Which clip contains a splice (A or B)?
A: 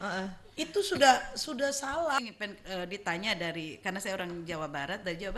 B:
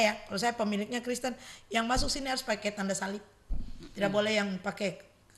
A